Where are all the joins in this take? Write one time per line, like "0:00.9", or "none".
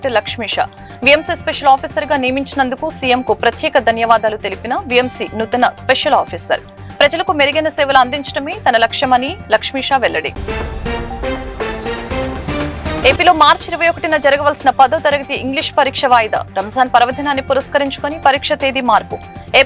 none